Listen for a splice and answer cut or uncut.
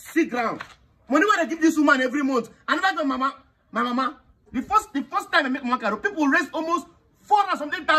cut